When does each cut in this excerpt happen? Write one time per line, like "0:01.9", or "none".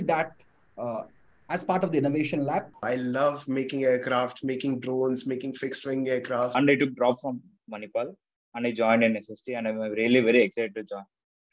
0:02.8
0:06.5